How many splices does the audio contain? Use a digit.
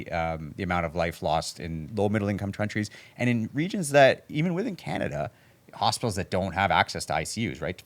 1